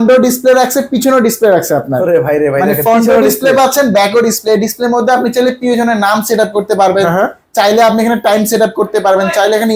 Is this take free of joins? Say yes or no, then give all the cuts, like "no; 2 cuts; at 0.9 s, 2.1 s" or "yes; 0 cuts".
yes; 0 cuts